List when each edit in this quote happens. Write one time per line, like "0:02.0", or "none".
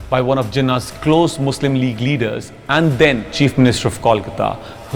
0:03.3